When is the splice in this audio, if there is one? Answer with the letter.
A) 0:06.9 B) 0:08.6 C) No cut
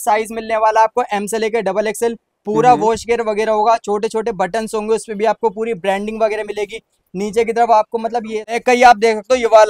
B